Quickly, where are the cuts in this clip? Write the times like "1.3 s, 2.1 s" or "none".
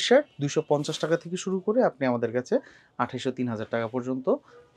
none